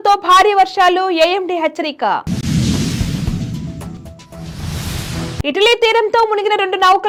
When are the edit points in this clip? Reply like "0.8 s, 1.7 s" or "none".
none